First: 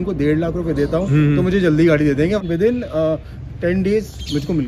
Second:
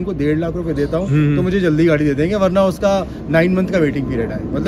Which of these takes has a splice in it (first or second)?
first